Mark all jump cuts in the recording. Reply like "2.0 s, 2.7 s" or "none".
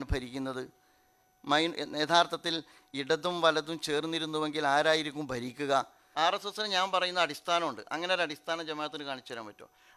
6.0 s